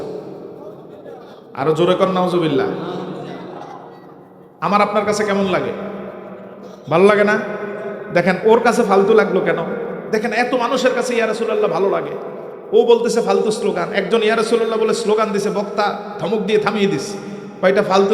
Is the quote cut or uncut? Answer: cut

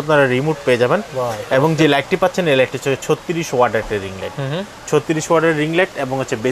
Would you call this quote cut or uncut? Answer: uncut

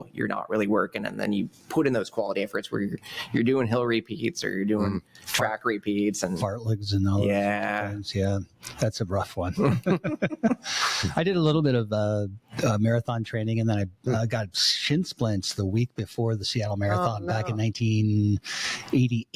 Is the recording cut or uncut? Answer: uncut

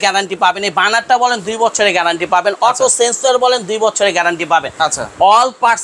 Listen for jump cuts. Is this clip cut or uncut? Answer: uncut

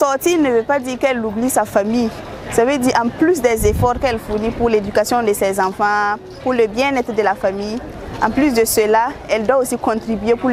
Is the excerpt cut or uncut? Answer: uncut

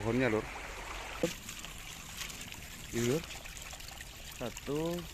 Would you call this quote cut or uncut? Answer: cut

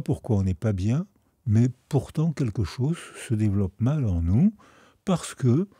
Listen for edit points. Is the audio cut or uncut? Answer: uncut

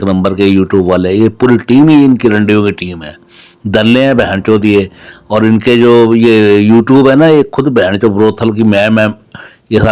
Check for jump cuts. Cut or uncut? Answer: uncut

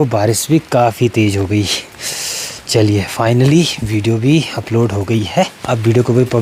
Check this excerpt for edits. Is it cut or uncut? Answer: uncut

